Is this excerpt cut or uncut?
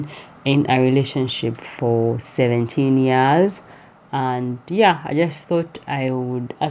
uncut